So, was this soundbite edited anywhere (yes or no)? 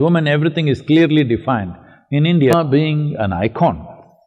yes